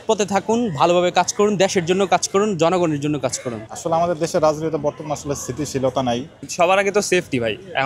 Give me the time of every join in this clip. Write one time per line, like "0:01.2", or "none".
0:06.4